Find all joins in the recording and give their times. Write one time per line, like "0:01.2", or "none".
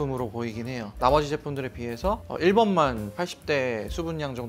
none

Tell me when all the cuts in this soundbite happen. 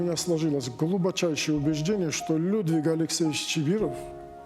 none

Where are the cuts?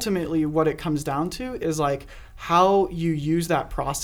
none

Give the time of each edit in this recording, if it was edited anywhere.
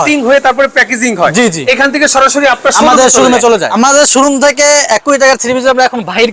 0:03.7

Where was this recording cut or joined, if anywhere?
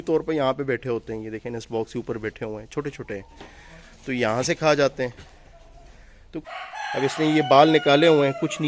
0:06.4

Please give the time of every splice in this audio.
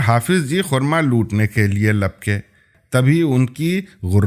0:02.7

